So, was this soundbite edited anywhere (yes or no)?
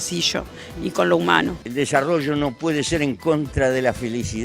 yes